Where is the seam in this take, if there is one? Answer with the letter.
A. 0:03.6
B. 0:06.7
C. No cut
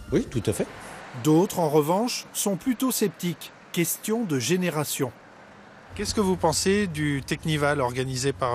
C